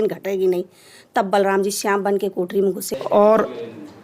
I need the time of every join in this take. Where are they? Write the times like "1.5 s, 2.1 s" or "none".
2.9 s